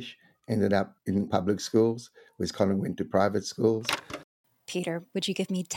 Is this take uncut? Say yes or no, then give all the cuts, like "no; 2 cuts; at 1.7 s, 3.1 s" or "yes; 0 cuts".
no; 2 cuts; at 1.2 s, 4.5 s